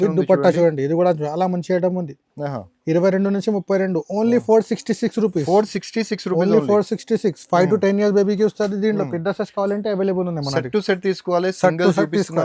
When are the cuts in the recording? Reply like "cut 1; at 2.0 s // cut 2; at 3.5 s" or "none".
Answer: none